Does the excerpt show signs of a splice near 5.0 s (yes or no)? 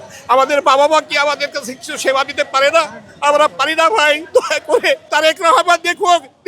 yes